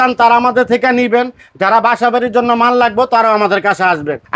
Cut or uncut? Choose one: uncut